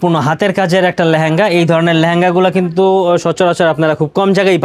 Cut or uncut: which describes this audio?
uncut